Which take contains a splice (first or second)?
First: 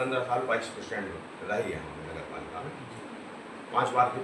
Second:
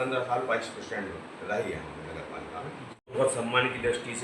second